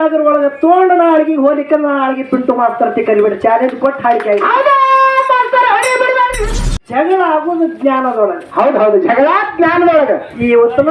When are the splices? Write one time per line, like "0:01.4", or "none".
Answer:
0:06.6